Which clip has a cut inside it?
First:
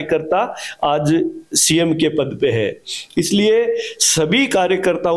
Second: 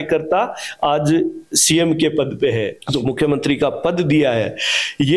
second; 1 cut; at 2.8 s

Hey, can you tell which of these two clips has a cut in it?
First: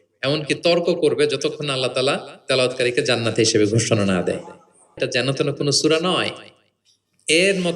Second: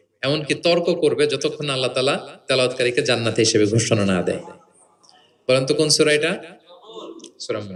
first; 1 cut; at 4.9 s

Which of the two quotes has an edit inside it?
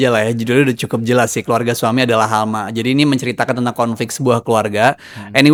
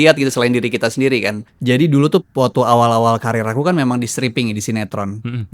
second; 1 cut; at 1.5 s

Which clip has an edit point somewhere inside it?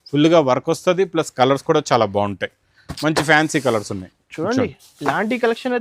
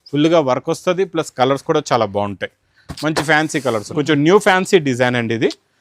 second; 1 cut; at 3.9 s

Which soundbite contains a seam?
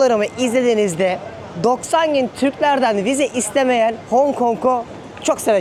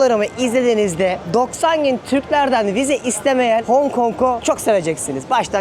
second; 3 cuts; at 1.2 s, 3.6 s, 4.4 s

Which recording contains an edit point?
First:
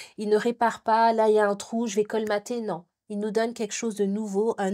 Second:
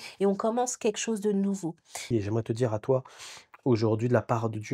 second; 1 cut; at 2.0 s

